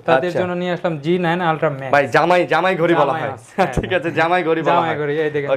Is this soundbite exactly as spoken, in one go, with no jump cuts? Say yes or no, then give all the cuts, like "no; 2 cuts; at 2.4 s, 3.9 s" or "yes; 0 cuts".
yes; 0 cuts